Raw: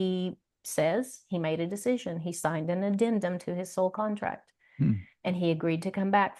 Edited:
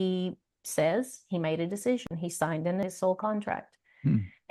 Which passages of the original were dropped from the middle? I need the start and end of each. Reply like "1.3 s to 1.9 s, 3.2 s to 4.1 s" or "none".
2.5 s to 3.3 s